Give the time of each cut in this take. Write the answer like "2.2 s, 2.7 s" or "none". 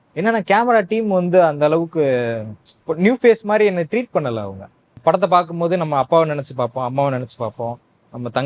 4.9 s